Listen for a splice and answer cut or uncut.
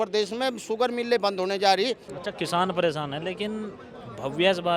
cut